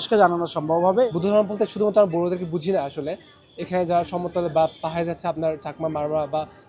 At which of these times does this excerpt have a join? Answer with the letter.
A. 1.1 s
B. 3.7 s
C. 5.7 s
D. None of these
A